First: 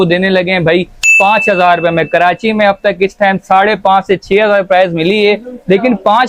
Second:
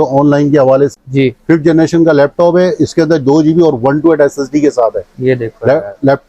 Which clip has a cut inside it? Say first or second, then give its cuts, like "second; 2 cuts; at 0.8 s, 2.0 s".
second; 1 cut; at 0.9 s